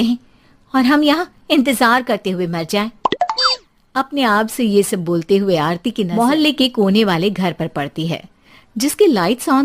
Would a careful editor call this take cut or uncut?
cut